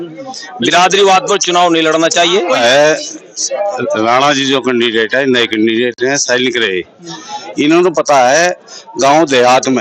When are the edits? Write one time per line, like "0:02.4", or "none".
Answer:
0:02.6